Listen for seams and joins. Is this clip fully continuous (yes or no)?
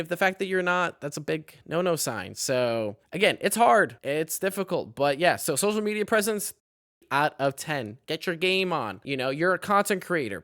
no